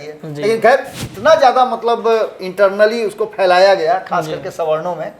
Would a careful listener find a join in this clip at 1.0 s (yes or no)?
yes